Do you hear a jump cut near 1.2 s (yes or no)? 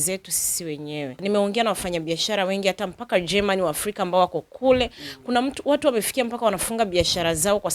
yes